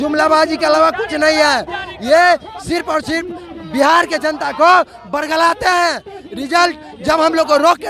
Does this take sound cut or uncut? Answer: uncut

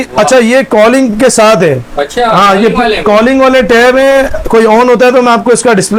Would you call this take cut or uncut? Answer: uncut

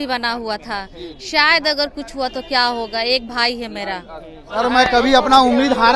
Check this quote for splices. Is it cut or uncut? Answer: cut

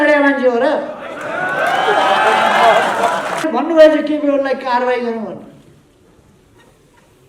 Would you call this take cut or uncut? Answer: cut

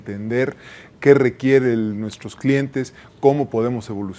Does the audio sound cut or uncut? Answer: uncut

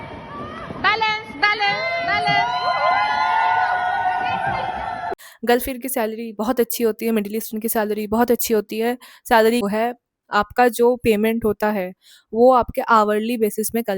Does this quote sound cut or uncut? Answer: cut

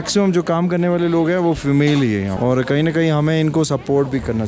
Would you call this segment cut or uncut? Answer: cut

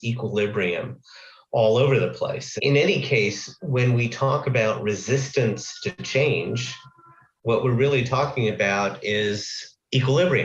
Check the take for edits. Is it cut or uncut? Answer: cut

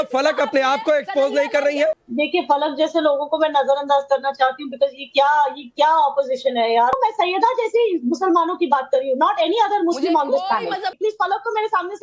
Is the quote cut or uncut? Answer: cut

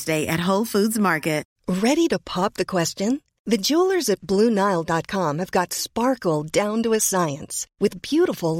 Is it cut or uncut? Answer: cut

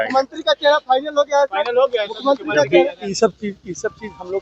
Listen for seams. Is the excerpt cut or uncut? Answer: cut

